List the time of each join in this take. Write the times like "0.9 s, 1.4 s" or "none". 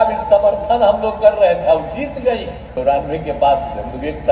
2.6 s